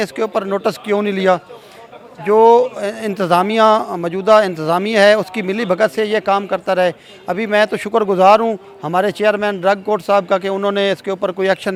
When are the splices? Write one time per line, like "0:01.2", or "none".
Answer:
none

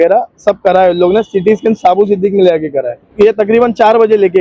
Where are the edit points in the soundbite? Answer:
0:03.0

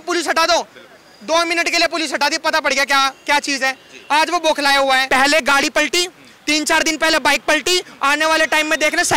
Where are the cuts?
0:05.0

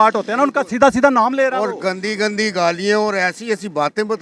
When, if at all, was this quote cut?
none

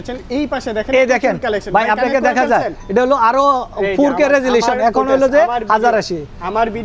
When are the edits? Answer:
none

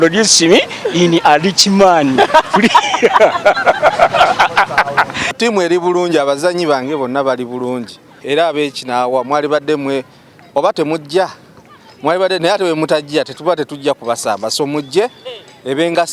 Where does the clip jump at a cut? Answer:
0:05.3
0:08.1

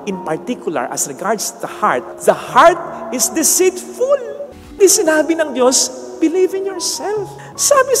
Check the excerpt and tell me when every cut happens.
0:04.8

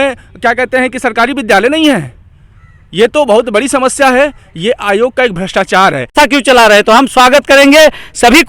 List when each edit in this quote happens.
0:06.1

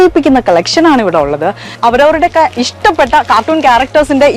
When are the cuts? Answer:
0:01.8

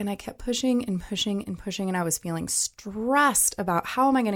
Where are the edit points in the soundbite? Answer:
none

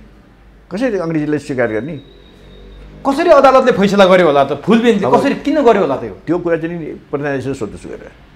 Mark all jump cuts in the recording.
none

